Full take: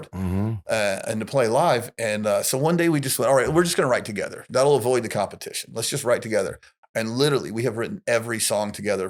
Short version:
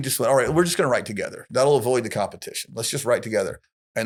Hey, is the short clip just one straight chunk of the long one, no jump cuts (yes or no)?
yes